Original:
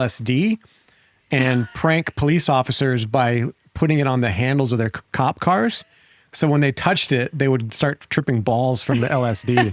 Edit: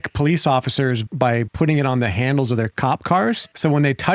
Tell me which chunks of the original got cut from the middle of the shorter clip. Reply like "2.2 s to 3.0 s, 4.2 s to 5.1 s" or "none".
3.1 s to 3.3 s, 5.2 s to 5.7 s